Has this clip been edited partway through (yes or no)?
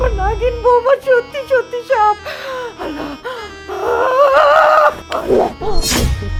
no